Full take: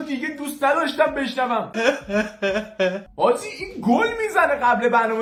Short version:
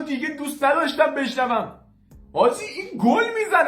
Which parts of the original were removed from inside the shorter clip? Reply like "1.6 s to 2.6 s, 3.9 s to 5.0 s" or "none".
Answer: 1.8 s to 2.6 s